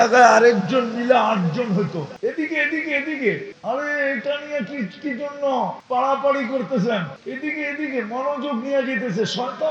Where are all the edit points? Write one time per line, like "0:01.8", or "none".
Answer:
0:02.1
0:03.5
0:05.8
0:07.2